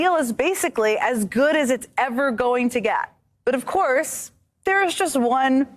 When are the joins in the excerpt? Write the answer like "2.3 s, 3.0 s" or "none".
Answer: none

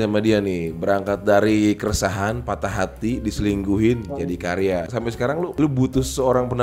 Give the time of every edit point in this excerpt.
5.4 s

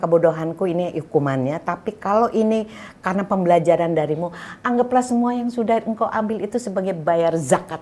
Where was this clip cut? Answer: none

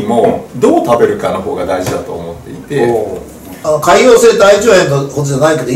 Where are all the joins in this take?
3.6 s

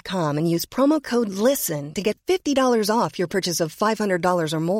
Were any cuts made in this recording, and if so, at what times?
none

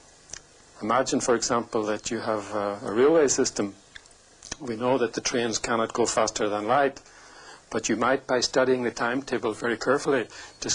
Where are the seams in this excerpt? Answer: none

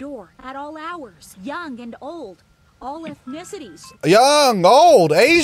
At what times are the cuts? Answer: 1.2 s, 3.8 s

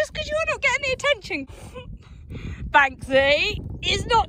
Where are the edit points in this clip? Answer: 1.4 s

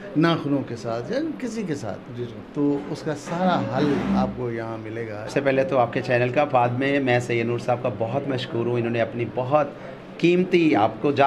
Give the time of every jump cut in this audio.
5.3 s

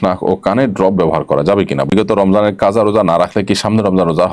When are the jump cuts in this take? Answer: 1.9 s

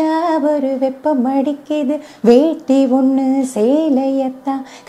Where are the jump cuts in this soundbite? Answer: none

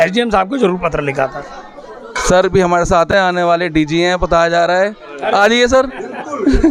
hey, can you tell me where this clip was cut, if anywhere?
none

